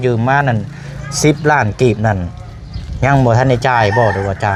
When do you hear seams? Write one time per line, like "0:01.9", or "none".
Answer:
none